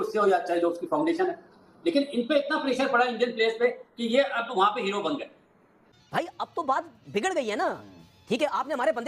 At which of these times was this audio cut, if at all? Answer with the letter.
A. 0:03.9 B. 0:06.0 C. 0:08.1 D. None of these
B